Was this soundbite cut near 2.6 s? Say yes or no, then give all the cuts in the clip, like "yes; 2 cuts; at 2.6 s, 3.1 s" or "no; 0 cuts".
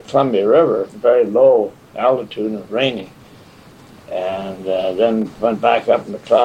no; 1 cut; at 0.9 s